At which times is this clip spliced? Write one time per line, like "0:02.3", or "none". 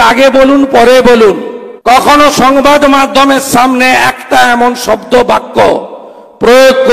0:02.1